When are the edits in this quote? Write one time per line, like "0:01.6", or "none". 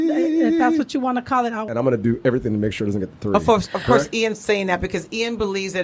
0:01.7